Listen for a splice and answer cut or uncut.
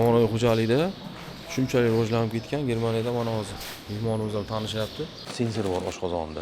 cut